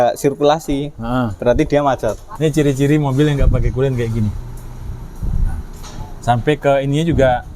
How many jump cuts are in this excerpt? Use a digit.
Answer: 1